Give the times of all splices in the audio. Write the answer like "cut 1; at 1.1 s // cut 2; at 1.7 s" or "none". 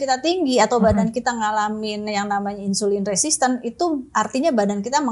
none